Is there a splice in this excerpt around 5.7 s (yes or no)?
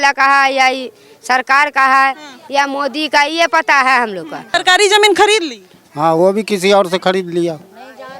no